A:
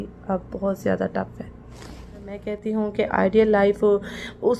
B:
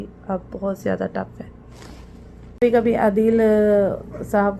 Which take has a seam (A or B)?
A